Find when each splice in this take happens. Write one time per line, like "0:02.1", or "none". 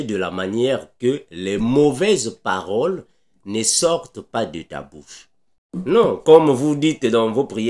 0:05.7